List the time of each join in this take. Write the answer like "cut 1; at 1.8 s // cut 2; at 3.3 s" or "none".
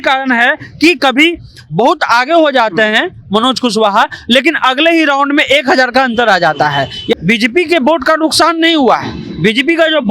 cut 1; at 7.1 s